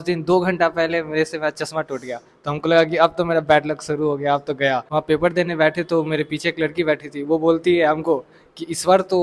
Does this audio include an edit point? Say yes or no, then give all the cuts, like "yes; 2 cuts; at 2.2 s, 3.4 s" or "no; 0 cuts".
yes; 1 cut; at 4.9 s